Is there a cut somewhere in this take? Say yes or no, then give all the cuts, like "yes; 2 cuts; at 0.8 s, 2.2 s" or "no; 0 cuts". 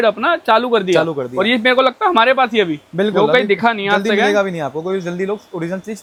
no; 0 cuts